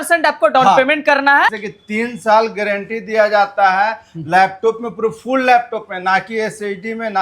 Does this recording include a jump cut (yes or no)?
yes